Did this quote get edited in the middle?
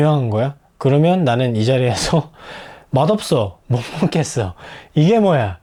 no; 0 cuts

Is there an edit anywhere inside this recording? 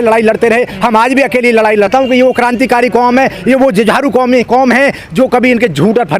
yes; 1 cut; at 1.9 s

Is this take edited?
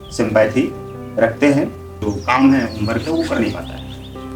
yes; 1 cut; at 1.9 s

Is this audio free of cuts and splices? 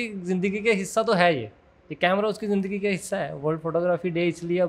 yes; 0 cuts

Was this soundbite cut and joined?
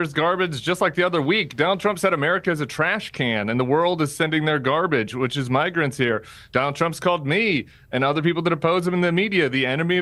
no; 0 cuts

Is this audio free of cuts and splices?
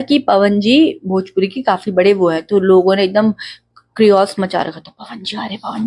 yes; 0 cuts

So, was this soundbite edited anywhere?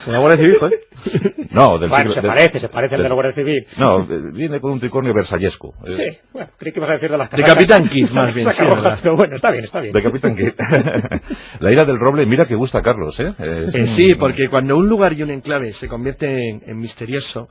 yes; 1 cut; at 6.2 s

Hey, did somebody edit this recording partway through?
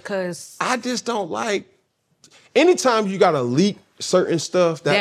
no; 0 cuts

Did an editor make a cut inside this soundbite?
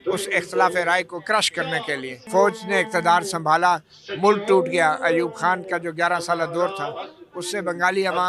yes; 1 cut; at 2.1 s

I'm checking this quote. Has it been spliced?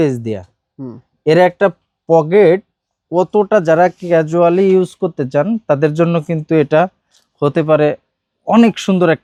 no; 0 cuts

